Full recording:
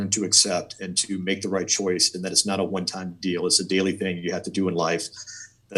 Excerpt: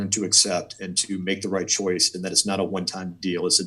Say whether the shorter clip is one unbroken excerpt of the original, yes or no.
yes